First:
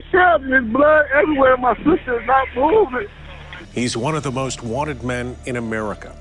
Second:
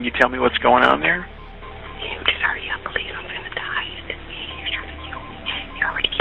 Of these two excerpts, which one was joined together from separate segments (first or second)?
first